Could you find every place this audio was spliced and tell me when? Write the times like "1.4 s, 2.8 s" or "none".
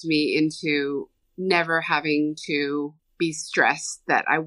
1.2 s, 3.0 s